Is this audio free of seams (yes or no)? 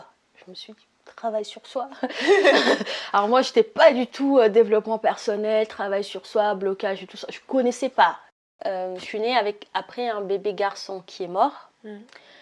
no